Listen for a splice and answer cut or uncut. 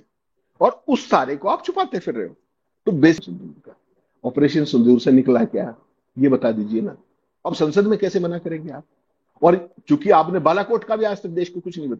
cut